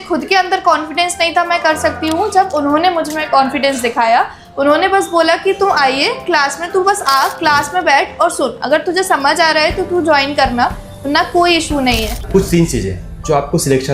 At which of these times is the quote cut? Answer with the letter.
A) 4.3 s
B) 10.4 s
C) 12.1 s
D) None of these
C